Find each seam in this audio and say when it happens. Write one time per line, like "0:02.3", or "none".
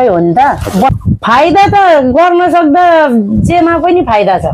0:01.0

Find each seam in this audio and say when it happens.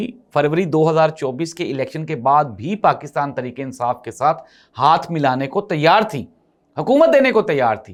none

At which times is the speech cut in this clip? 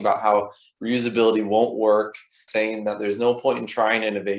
0:02.5

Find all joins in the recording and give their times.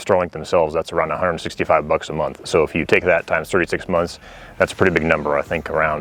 none

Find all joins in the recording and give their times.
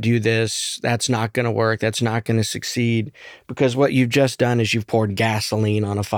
none

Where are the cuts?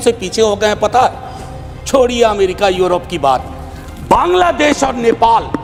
none

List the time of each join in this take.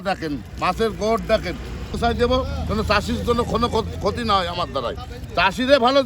0:02.0

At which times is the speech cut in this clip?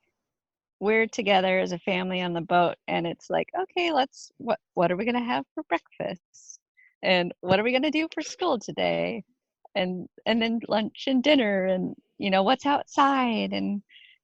none

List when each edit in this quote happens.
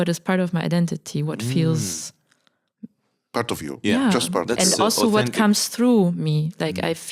none

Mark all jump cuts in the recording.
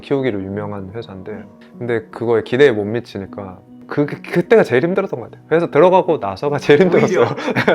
0:01.5
0:03.8

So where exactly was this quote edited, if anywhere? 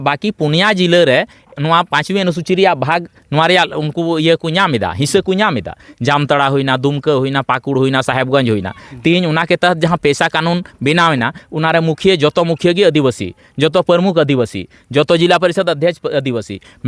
none

